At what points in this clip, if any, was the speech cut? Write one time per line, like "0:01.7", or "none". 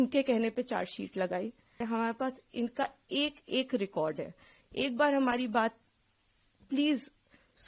0:01.8

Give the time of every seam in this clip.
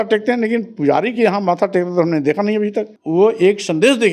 0:03.0

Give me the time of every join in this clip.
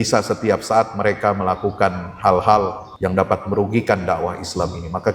0:02.8

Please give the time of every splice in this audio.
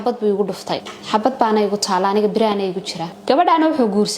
0:00.9
0:03.1

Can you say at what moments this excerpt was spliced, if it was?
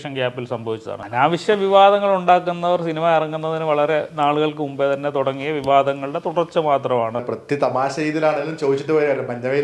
0:00.9
0:07.2

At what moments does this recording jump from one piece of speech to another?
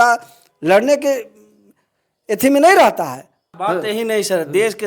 0:03.5

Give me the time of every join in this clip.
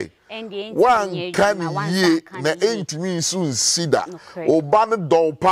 none

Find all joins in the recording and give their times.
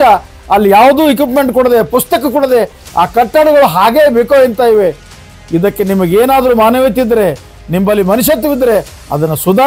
0:07.5

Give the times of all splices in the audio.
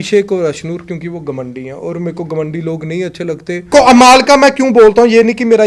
0:03.7

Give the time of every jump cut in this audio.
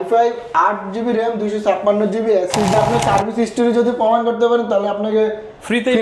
0:02.7

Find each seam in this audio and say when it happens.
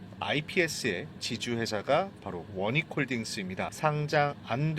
0:03.7

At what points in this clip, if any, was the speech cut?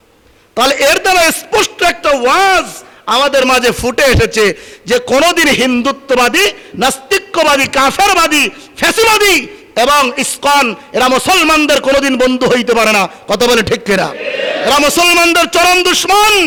none

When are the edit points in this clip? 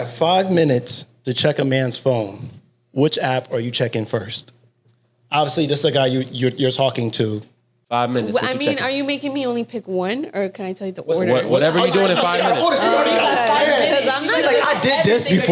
none

